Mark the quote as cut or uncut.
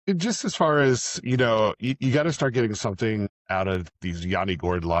cut